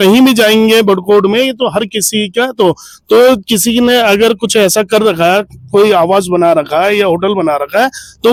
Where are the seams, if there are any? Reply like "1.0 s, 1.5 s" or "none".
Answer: none